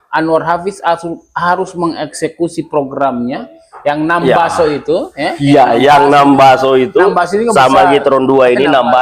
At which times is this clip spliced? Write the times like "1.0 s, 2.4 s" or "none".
none